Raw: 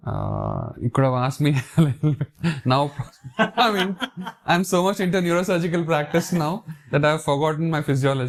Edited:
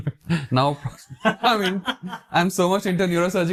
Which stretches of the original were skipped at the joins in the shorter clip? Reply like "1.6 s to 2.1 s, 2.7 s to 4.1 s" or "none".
none